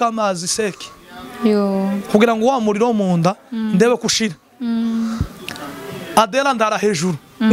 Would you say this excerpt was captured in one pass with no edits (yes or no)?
yes